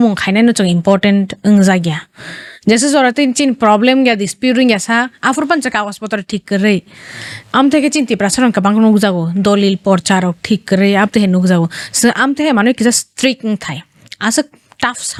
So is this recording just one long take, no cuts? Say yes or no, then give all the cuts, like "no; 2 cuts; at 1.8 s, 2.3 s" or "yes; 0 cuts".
yes; 0 cuts